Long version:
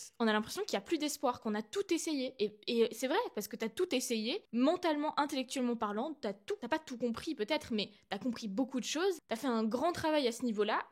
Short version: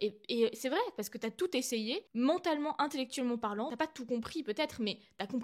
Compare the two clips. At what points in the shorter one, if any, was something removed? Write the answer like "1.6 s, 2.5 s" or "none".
3.7 s